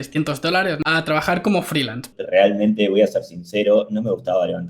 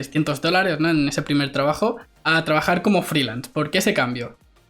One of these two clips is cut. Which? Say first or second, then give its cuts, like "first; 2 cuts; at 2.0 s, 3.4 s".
first; 2 cuts; at 0.8 s, 2.1 s